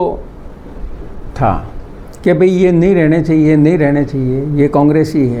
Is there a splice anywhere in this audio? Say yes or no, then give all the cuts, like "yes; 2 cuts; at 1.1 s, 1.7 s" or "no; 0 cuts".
no; 0 cuts